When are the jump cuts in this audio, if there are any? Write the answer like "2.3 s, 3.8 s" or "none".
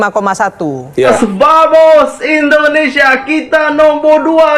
1.2 s